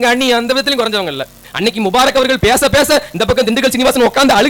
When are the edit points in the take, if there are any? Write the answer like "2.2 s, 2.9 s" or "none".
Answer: 1.4 s